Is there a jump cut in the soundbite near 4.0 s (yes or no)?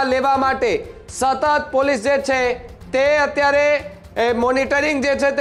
no